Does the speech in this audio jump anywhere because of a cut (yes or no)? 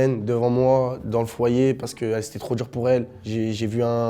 no